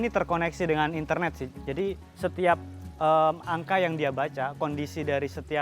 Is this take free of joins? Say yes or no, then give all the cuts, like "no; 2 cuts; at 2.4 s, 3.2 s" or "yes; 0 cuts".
no; 1 cut; at 1.4 s